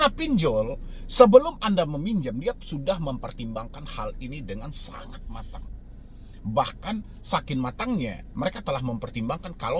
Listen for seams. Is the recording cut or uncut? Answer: uncut